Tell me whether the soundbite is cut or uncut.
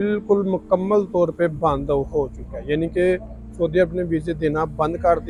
uncut